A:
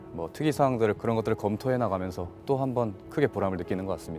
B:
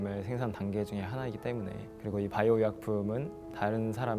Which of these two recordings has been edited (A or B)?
A